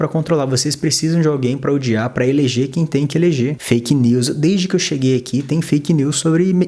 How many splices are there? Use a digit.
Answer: 0